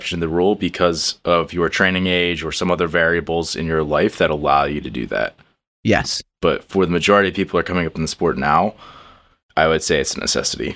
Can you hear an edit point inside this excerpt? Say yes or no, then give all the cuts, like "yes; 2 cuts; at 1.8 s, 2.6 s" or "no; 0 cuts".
no; 0 cuts